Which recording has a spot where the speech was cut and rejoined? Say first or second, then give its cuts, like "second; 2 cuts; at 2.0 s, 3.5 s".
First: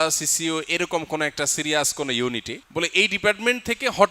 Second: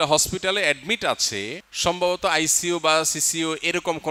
first; 1 cut; at 2.6 s